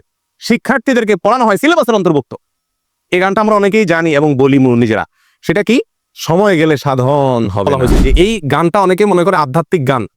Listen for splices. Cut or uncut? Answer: cut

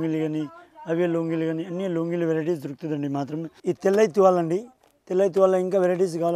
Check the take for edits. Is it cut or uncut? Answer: cut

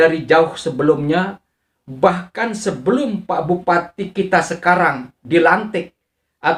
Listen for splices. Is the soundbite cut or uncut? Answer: uncut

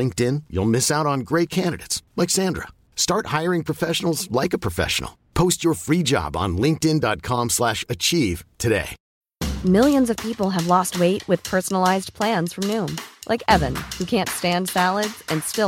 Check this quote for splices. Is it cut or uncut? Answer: cut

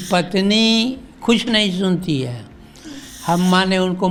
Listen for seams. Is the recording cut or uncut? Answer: uncut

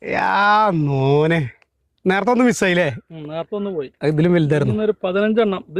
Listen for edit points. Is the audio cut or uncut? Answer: uncut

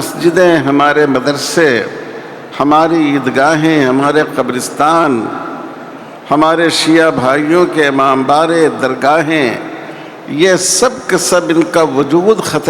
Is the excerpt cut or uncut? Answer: uncut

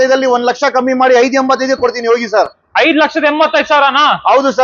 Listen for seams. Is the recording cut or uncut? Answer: uncut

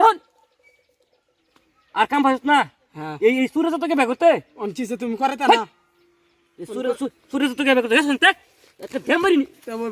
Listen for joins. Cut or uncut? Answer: cut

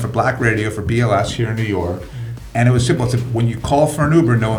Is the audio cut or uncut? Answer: uncut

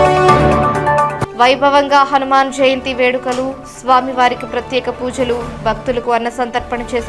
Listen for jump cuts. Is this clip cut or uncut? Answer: cut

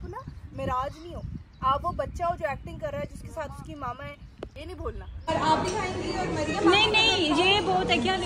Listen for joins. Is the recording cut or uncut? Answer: cut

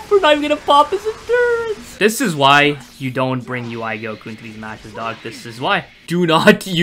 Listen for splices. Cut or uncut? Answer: cut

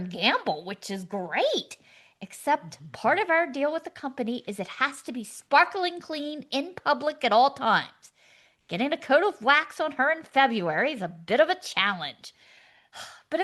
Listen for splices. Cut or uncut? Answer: uncut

